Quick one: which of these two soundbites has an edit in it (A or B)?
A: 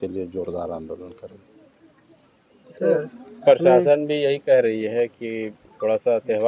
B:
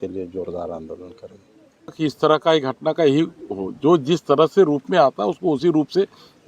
B